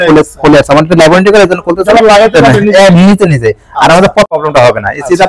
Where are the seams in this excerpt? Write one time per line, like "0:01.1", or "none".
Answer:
0:04.3

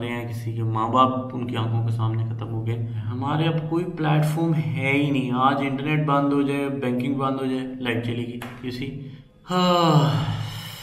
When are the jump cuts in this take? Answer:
0:03.0
0:09.3

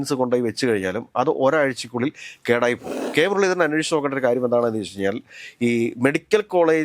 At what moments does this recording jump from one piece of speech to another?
0:02.9

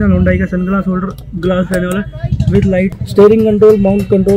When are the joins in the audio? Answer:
0:03.0

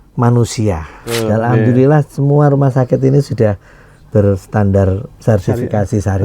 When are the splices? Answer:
0:01.0

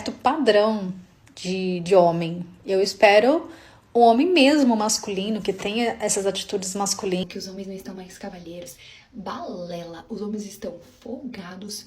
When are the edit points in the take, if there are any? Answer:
0:07.3

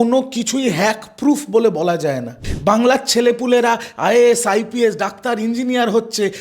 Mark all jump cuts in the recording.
0:02.5

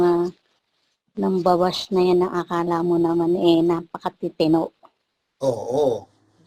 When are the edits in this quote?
none

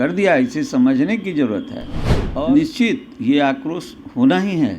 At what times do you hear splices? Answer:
0:02.1

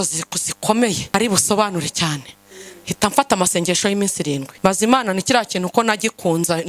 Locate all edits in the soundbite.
0:01.0
0:04.5

